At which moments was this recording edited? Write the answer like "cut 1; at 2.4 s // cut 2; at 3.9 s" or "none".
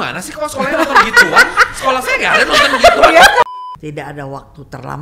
cut 1; at 3.4 s